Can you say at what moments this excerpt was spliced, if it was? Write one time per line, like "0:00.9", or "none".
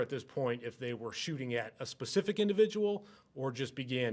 none